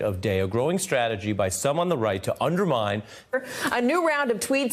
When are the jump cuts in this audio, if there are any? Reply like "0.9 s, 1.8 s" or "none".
none